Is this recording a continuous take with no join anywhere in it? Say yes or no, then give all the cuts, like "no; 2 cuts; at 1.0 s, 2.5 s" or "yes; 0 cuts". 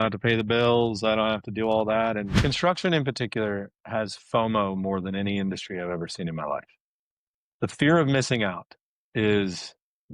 no; 1 cut; at 2.4 s